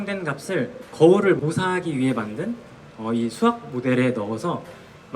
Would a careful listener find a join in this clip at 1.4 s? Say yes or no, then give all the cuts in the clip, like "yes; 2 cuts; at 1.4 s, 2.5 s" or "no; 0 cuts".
yes; 2 cuts; at 0.9 s, 1.4 s